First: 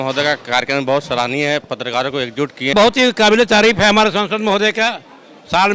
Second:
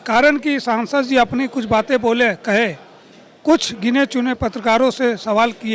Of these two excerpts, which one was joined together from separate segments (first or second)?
first